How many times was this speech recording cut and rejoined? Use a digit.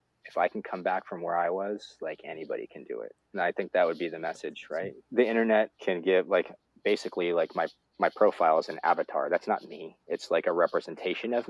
3